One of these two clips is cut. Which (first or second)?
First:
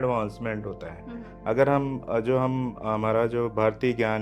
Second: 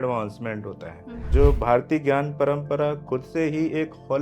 second